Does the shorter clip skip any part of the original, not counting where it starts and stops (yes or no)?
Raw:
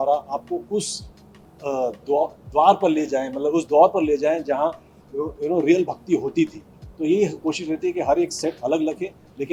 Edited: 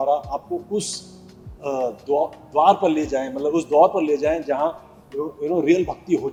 no